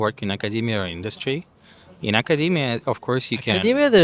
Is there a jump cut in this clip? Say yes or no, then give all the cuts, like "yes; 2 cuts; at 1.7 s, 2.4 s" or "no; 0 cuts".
no; 0 cuts